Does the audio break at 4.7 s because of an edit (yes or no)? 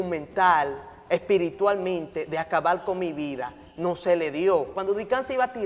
yes